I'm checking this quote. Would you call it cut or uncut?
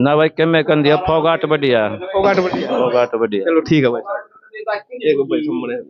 uncut